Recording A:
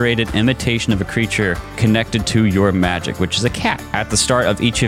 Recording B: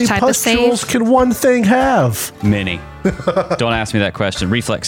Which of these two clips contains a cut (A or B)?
A